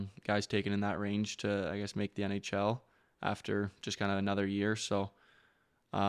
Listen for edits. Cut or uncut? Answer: uncut